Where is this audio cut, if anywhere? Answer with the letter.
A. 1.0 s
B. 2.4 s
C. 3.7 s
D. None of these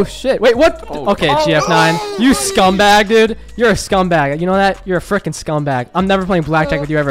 D